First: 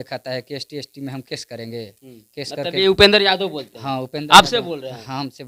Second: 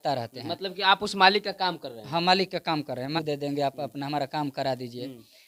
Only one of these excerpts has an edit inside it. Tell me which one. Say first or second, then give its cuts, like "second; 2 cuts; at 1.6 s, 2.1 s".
second; 1 cut; at 3.1 s